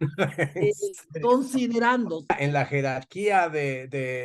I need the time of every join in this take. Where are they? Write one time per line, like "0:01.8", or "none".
0:02.3